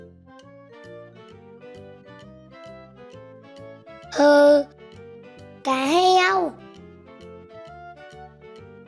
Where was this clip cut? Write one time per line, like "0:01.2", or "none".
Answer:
0:04.1
0:07.1